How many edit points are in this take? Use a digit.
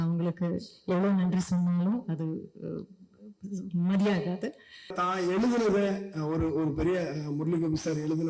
1